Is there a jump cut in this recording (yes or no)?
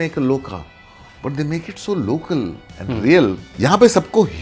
yes